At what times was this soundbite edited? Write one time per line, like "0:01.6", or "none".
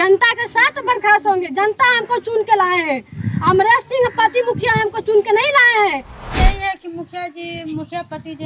0:06.2